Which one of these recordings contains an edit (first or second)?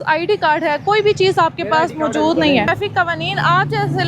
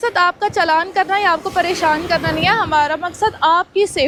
first